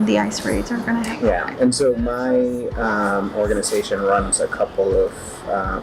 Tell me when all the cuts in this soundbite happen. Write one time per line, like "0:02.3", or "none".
0:01.2